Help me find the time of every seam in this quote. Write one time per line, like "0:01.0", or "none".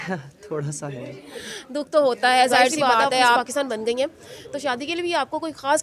0:03.4